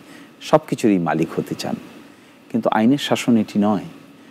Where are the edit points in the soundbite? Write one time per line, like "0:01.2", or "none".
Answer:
none